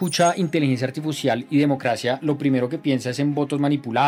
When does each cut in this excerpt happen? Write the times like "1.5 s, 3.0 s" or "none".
none